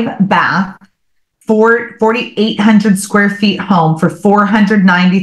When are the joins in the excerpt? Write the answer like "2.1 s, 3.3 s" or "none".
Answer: none

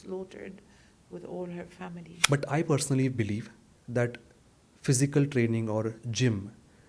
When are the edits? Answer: 2.1 s

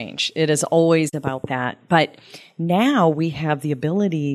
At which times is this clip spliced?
1.2 s

